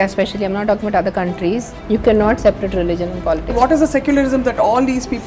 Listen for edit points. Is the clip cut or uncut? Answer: cut